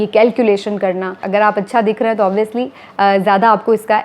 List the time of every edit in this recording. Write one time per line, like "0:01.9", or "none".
0:01.2